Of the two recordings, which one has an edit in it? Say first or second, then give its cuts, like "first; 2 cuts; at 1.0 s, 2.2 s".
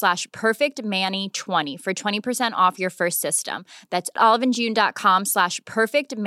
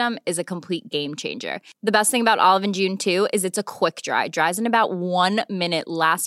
first; 1 cut; at 1.7 s